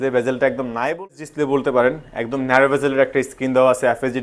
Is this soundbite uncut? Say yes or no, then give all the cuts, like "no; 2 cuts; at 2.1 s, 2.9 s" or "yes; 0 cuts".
no; 1 cut; at 1.1 s